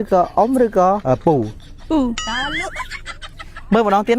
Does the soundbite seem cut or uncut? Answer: cut